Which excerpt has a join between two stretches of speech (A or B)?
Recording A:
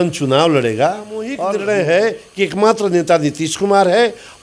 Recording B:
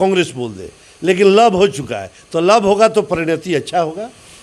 A